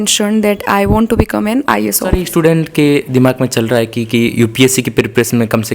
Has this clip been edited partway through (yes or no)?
yes